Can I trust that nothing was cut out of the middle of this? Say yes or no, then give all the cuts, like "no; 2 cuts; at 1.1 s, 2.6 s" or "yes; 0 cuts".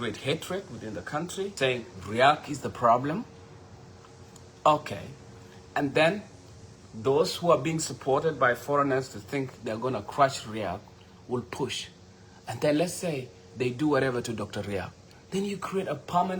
no; 1 cut; at 1.5 s